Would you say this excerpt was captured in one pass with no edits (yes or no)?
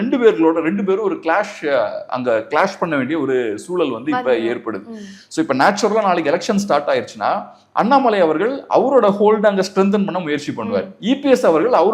yes